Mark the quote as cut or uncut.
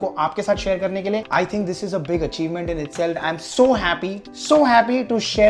cut